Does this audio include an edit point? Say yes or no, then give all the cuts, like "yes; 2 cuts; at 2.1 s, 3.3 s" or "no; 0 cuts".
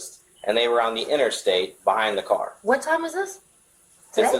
no; 0 cuts